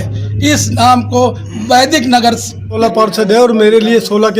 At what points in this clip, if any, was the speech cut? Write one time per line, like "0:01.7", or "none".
0:02.7